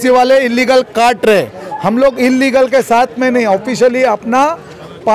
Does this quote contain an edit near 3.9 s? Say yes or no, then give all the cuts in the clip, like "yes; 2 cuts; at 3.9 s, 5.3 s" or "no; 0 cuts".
no; 0 cuts